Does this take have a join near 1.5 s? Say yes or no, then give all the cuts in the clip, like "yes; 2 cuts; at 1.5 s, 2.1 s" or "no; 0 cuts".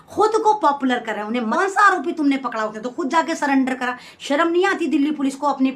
yes; 1 cut; at 1.5 s